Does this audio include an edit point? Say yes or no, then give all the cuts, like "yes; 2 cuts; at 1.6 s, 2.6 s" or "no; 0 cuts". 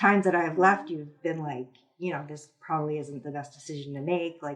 no; 0 cuts